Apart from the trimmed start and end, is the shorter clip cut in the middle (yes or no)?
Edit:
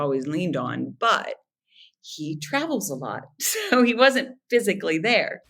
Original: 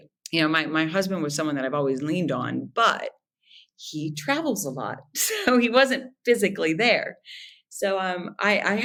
no